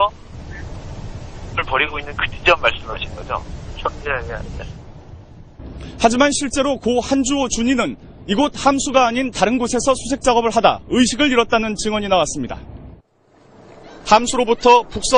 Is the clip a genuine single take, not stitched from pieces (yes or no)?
yes